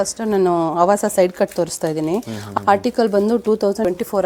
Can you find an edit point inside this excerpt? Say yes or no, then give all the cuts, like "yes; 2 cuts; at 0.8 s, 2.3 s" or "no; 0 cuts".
no; 0 cuts